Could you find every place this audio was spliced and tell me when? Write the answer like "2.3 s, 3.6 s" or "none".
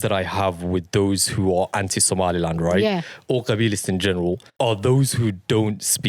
4.5 s